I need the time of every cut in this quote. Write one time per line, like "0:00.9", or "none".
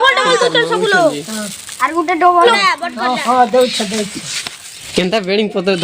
0:02.4
0:04.8